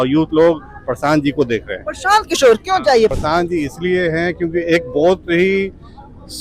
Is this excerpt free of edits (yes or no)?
no